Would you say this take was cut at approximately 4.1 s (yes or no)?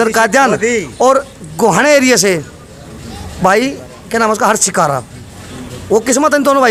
no